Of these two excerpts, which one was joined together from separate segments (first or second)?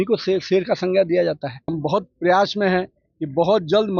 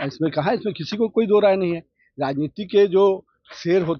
first